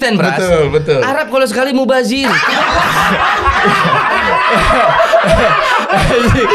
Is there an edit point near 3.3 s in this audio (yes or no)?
no